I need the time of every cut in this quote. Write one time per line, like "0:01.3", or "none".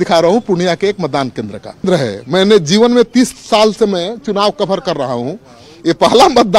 0:01.8